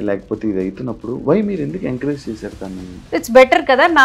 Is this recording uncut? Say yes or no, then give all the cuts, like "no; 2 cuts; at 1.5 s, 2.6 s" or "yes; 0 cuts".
no; 1 cut; at 3.1 s